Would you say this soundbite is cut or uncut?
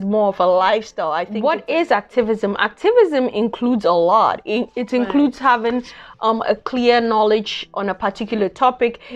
cut